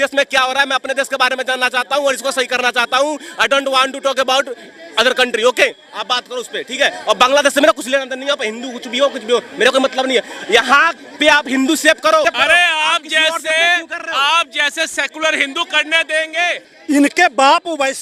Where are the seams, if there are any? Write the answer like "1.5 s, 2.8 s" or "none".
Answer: 12.2 s, 16.7 s